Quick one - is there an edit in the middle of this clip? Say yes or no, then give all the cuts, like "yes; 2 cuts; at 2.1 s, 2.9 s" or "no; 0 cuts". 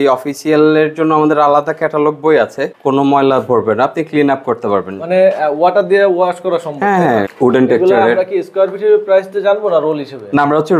yes; 2 cuts; at 2.7 s, 7.3 s